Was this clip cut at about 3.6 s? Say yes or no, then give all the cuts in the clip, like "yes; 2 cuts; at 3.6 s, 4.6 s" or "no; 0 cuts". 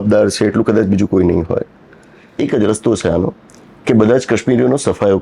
no; 1 cut; at 2.2 s